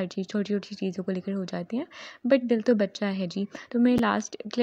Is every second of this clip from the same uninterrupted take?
yes; 0 cuts

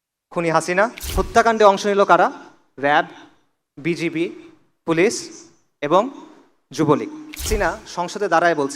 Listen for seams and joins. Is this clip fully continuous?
no; 2 cuts; at 1.1 s, 7.5 s

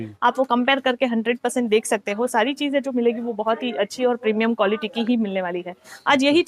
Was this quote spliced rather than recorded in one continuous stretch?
no; 0 cuts

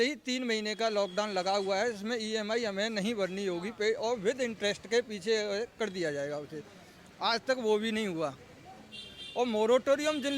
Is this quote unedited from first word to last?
yes; 0 cuts

